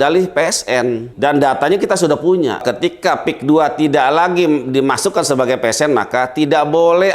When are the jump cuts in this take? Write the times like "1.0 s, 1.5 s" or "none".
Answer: 1.1 s, 2.6 s